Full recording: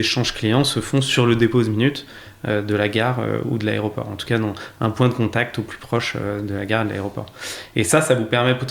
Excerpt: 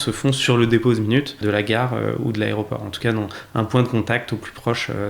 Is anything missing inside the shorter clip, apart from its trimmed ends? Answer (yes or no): yes